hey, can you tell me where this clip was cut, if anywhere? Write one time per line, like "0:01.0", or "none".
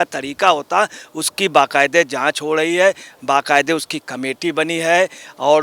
none